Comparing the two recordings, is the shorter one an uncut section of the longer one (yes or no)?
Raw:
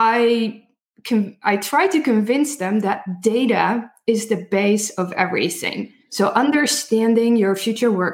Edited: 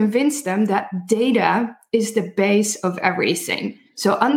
yes